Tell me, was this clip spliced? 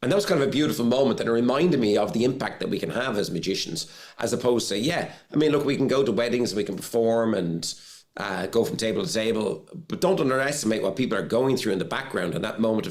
no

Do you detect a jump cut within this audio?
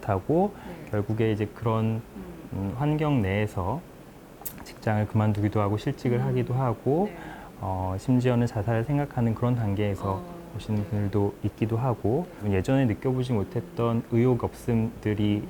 yes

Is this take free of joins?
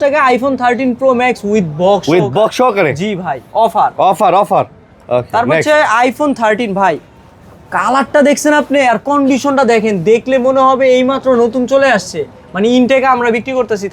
yes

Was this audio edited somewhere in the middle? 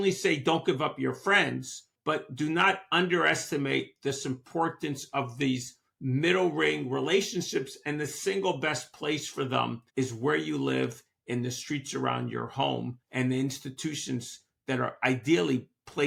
no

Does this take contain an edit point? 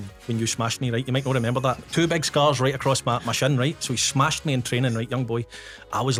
no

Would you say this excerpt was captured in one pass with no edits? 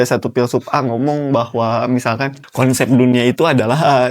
no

